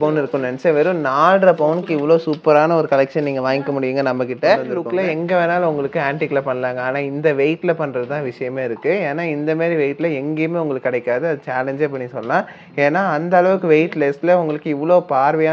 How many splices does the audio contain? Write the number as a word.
one